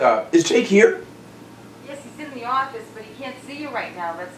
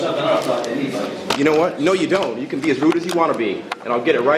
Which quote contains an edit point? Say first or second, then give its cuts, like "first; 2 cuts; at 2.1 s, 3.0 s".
second; 1 cut; at 1.7 s